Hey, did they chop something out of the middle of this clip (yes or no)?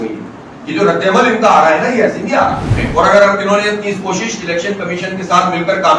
yes